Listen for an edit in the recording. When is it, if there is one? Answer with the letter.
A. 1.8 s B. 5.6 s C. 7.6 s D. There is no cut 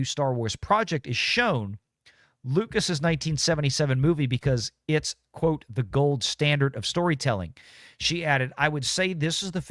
D